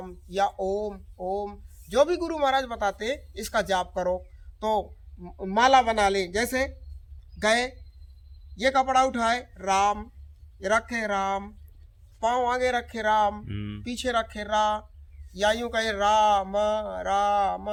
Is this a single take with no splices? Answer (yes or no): yes